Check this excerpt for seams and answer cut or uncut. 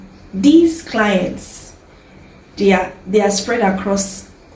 uncut